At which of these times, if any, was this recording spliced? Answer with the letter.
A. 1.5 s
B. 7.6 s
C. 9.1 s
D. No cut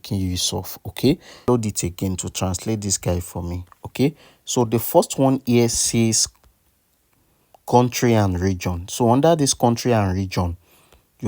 A